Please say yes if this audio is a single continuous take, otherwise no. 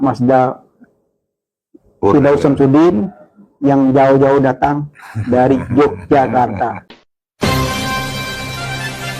no